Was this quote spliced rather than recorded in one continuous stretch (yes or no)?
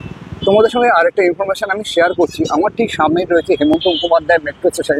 no